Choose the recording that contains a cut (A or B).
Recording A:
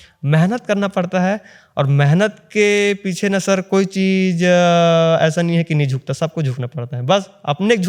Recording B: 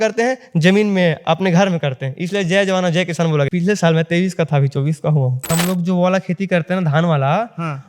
B